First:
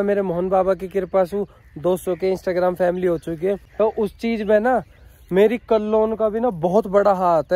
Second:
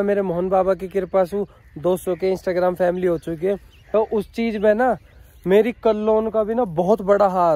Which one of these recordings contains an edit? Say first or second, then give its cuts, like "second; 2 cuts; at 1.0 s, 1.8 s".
first; 1 cut; at 3.7 s